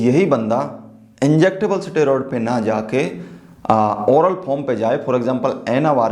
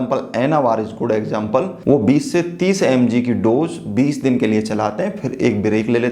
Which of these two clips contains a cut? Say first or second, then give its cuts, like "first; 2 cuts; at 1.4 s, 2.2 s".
second; 1 cut; at 1.7 s